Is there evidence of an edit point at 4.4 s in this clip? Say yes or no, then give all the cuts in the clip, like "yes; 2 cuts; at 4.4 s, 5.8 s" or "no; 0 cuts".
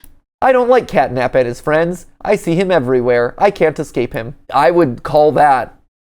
yes; 1 cut; at 4.4 s